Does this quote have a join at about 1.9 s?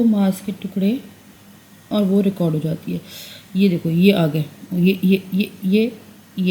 yes; 1 cut; at 1.9 s

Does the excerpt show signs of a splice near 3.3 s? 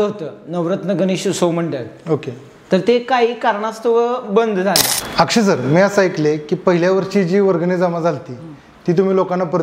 no; 1 cut; at 5.0 s

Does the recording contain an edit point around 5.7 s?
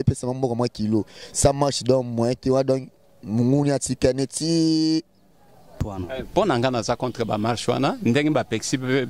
yes; 1 cut; at 5.7 s

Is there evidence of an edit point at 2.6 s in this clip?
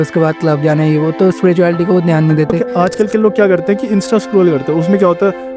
yes; 1 cut; at 2.6 s

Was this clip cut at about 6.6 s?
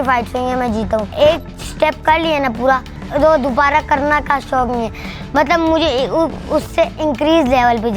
no; 2 cuts; at 1.1 s, 3.0 s

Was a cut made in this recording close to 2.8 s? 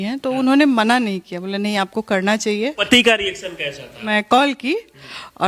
yes; 2 cuts; at 2.8 s, 4.1 s

